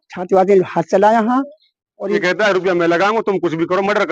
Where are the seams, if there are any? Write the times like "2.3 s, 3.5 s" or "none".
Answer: 2.2 s